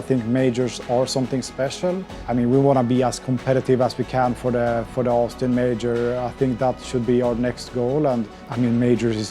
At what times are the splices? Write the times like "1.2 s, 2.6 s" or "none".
2.1 s, 8.4 s